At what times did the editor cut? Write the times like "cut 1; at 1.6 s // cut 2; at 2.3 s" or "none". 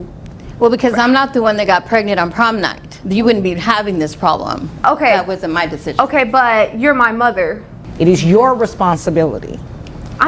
cut 1; at 7.7 s